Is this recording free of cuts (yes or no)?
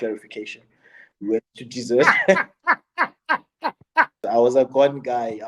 no